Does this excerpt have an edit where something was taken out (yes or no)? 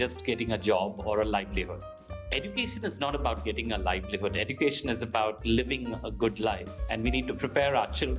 no